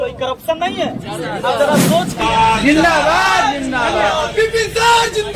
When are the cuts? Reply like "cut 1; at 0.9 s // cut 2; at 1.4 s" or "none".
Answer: cut 1; at 2.1 s